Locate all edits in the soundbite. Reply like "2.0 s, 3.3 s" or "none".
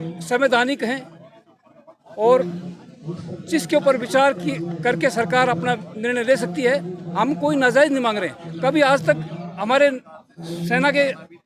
none